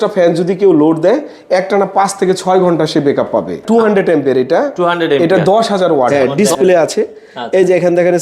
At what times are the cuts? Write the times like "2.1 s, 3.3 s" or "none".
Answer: 3.6 s, 6.1 s

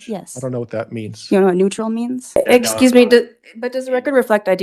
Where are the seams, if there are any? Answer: 2.3 s

